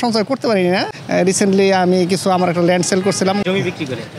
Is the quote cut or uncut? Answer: cut